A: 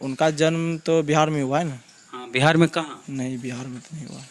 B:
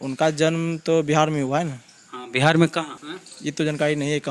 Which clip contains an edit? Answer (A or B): B